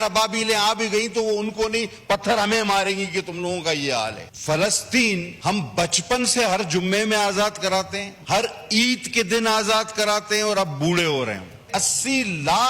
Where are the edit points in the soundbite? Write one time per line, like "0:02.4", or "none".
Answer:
0:04.3
0:05.3
0:08.1
0:11.7